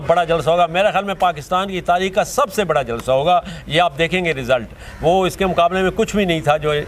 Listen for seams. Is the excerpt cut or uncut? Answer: uncut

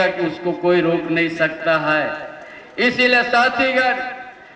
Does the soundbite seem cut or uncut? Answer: uncut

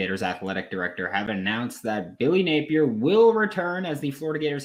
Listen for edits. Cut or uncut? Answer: uncut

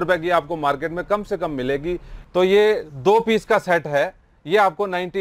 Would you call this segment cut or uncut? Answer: cut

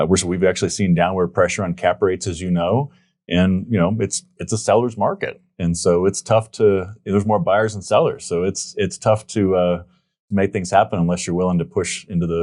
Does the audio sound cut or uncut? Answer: uncut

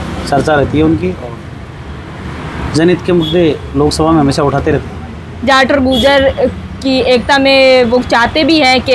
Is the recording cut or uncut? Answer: uncut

